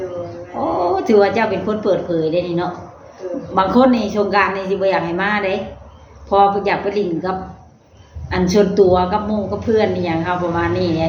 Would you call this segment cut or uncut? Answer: uncut